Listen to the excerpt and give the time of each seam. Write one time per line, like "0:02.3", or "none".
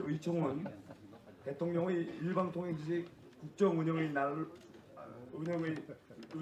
none